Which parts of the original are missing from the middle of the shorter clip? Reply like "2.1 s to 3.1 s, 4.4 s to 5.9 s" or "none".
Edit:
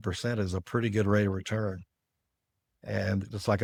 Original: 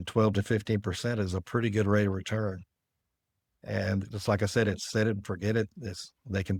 none